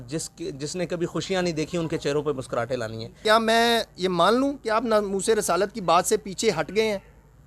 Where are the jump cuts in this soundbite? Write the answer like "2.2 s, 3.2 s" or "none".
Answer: 3.2 s